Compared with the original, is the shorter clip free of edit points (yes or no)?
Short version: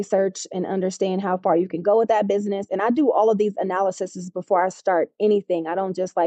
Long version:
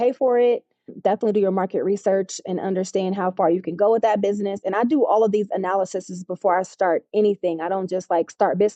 yes